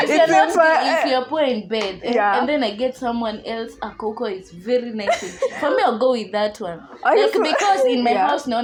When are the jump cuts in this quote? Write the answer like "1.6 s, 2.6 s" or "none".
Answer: none